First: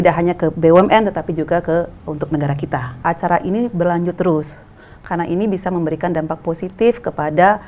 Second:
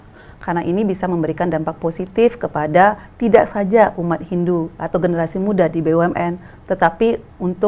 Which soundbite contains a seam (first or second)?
first